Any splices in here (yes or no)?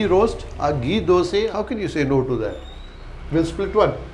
yes